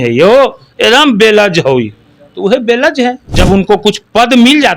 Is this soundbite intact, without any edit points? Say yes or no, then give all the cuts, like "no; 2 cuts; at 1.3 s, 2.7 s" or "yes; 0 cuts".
no; 1 cut; at 3.3 s